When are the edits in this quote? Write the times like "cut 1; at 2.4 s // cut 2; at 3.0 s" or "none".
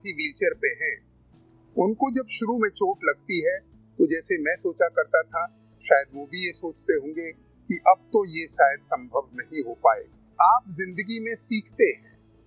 cut 1; at 10.2 s